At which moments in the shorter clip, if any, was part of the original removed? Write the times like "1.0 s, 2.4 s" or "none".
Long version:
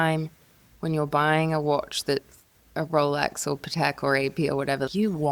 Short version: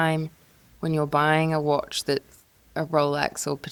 none